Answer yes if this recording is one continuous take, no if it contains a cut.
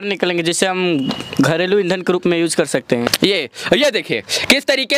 no